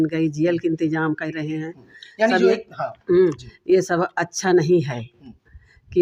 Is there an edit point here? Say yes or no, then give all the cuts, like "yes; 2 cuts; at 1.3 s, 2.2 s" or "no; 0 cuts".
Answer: no; 0 cuts